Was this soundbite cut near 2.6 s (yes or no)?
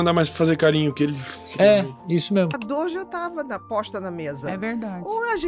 yes